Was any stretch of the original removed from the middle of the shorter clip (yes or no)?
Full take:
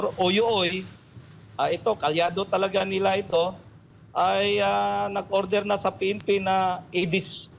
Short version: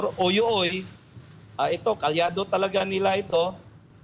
no